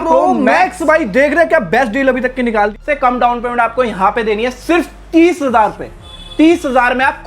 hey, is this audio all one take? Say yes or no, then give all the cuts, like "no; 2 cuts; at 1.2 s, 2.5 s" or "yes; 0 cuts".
no; 1 cut; at 2.7 s